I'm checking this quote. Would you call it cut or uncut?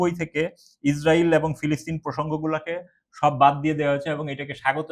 uncut